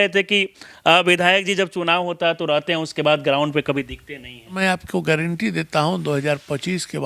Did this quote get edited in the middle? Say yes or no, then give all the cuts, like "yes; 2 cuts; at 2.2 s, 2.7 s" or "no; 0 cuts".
yes; 1 cut; at 4.5 s